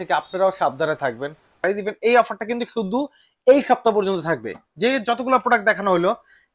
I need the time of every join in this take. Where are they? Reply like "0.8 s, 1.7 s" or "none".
1.6 s